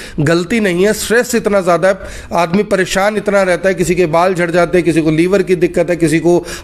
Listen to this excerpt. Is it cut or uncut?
uncut